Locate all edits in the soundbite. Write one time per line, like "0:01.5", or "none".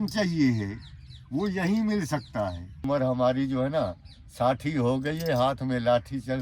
0:02.8